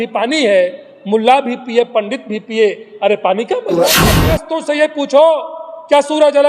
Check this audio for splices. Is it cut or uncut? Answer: cut